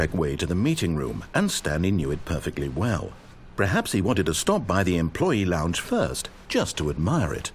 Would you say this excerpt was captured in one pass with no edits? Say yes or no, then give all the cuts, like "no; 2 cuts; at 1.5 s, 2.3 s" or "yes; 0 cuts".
yes; 0 cuts